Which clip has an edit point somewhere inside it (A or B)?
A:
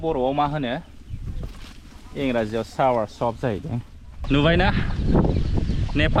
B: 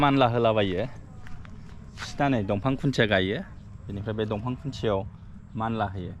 A